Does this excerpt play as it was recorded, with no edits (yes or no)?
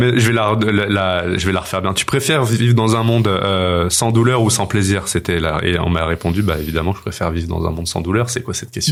yes